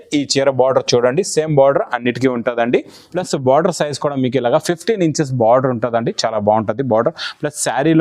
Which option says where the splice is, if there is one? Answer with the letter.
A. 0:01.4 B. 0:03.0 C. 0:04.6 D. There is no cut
B